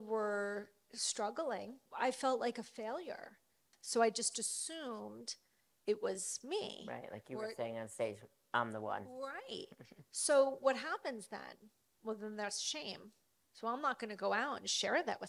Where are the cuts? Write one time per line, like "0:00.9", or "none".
0:01.8
0:03.6